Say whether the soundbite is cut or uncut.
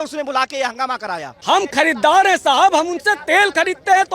cut